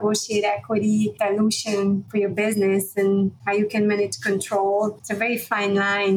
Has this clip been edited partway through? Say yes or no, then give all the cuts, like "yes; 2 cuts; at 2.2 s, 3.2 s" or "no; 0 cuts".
yes; 4 cuts; at 1.1 s, 2.1 s, 3.4 s, 5.0 s